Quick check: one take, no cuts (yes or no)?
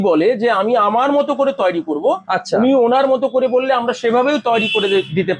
yes